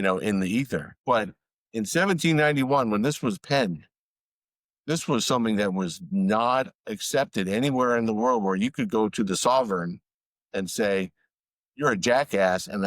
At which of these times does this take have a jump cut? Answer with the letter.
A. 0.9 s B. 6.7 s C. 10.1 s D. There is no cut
A